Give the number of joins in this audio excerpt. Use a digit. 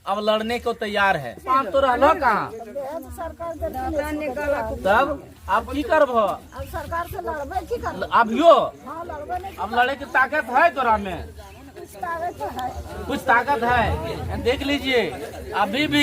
1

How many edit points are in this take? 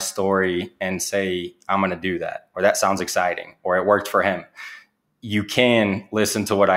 0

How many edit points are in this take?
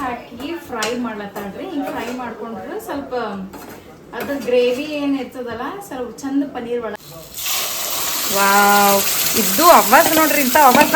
1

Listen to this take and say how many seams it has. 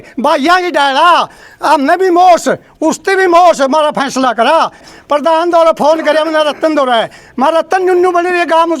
1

